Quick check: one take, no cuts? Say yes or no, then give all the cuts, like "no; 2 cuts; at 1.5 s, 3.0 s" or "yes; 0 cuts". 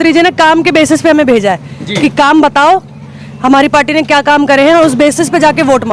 yes; 0 cuts